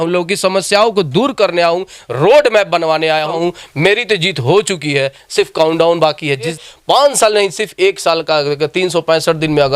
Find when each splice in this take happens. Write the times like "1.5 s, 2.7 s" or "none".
3.3 s, 6.6 s